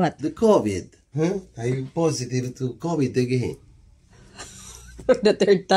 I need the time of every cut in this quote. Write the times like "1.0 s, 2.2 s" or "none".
1.0 s